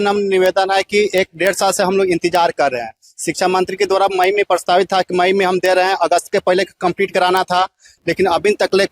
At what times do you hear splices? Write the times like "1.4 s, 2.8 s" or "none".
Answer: none